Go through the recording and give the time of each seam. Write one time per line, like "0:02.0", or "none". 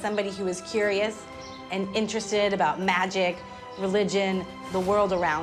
none